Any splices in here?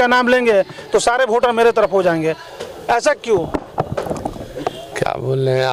no; 0 cuts

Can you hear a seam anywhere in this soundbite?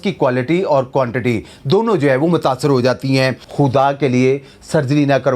yes; 1 cut; at 3.4 s

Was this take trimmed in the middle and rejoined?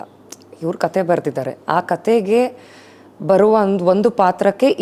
no; 0 cuts

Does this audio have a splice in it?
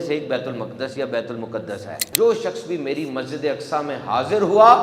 yes; 1 cut; at 2.1 s

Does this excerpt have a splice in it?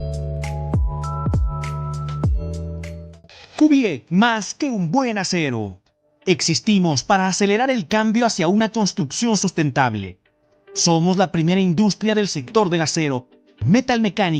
yes; 1 cut; at 3.1 s

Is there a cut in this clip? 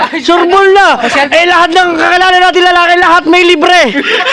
no; 0 cuts

